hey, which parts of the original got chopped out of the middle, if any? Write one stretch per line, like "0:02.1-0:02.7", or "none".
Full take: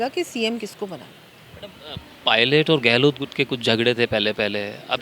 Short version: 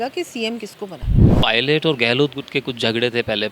0:01.2-0:02.0